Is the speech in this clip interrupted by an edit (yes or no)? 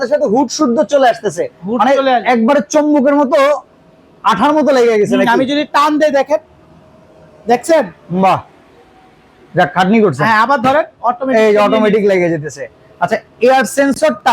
no